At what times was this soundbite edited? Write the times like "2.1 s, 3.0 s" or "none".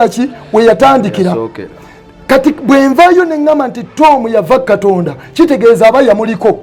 none